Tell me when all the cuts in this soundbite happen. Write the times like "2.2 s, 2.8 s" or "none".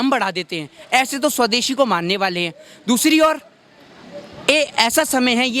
none